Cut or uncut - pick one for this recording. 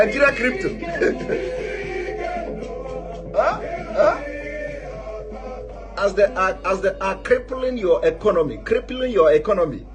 uncut